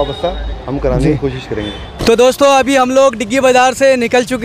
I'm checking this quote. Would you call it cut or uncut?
cut